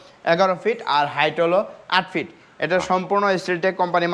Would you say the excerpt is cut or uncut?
uncut